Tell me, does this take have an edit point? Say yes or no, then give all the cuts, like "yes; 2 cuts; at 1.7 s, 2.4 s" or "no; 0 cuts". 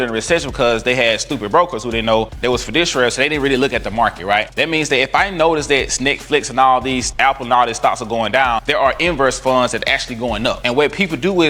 no; 0 cuts